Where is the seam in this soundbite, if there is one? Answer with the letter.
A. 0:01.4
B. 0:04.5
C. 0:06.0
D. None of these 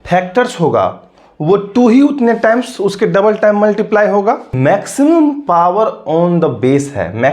B